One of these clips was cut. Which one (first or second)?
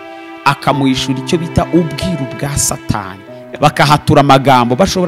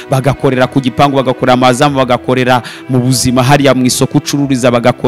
first